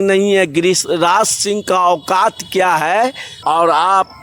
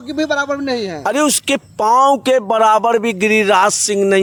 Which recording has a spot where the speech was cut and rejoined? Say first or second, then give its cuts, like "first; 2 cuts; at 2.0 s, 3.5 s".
first; 1 cut; at 3.3 s